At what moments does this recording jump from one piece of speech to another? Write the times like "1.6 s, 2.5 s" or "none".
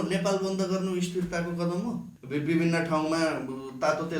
2.1 s